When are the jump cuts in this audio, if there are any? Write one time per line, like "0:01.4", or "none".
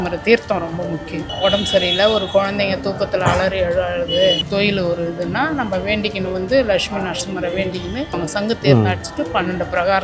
0:01.2
0:04.4
0:08.1

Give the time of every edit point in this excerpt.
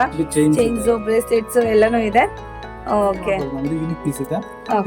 0:03.5

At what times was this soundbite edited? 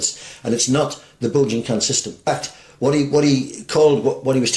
0:02.2

